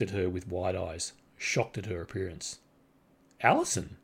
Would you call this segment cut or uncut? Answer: uncut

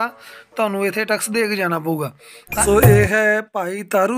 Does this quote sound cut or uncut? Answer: cut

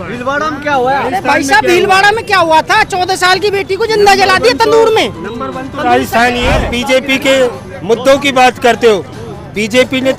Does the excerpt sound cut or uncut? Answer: cut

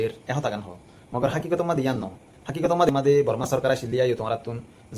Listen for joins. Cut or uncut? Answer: cut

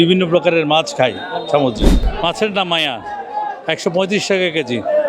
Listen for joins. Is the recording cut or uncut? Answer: cut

